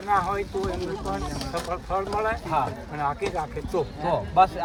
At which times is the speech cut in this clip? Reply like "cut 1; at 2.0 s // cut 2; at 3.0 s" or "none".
none